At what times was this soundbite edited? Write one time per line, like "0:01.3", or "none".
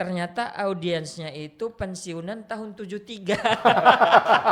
none